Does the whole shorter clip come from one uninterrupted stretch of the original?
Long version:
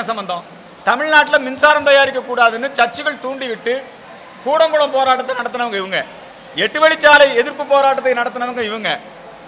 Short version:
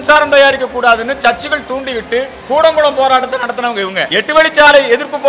no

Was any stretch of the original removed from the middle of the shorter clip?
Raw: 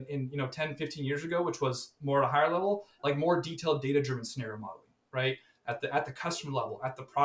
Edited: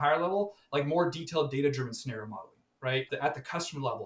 yes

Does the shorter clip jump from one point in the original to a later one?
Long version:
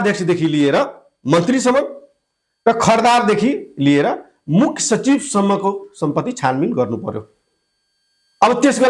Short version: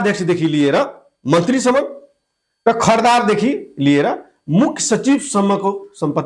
no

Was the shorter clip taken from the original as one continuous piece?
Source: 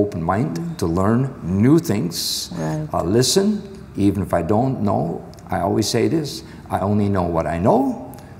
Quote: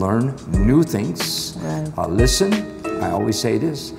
no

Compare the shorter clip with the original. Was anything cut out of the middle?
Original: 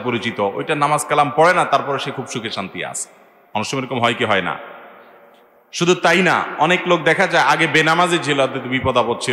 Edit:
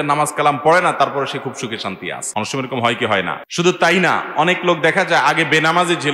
yes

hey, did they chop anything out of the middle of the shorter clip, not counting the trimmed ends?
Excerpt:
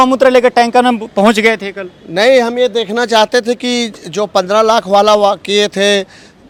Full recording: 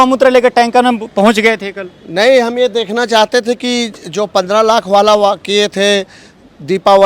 no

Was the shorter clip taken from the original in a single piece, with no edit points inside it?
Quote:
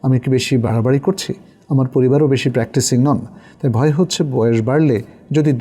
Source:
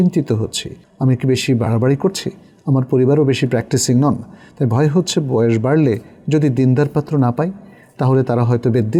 yes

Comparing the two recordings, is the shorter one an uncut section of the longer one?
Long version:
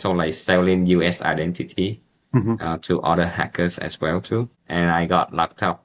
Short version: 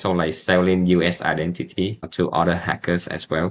no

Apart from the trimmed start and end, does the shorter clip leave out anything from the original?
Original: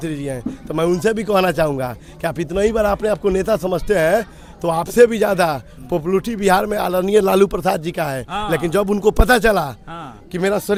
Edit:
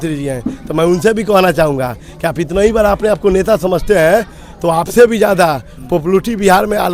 no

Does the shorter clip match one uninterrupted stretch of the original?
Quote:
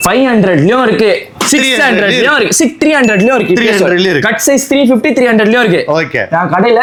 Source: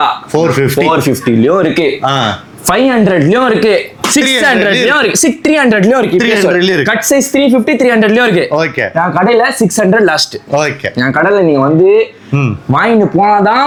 yes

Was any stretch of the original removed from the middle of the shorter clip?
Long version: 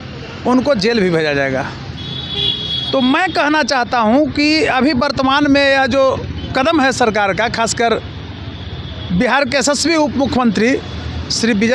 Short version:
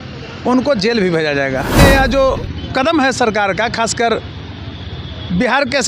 yes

